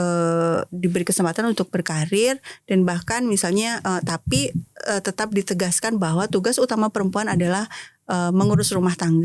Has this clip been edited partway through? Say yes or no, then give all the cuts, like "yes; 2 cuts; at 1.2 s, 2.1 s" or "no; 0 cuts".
no; 0 cuts